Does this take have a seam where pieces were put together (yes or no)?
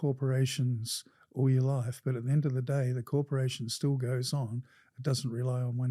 no